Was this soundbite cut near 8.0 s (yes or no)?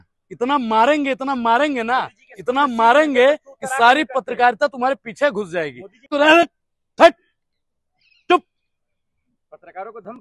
no